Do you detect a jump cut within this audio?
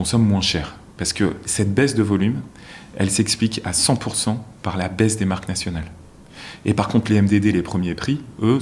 no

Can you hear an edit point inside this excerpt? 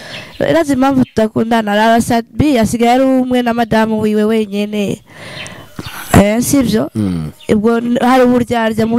no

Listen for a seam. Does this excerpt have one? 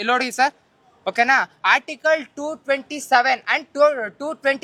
no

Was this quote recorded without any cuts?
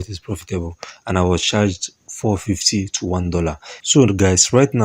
no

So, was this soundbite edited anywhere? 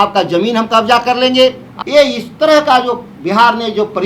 yes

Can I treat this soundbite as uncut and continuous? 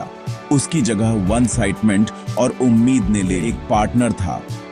no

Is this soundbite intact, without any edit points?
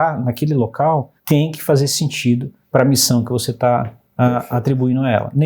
no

